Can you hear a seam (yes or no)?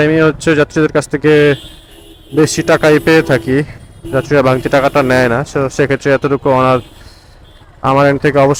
no